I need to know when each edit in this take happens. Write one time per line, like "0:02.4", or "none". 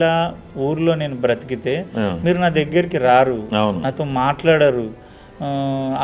none